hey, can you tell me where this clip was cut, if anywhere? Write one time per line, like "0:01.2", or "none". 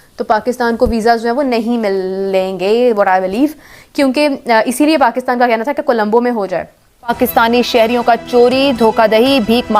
0:07.1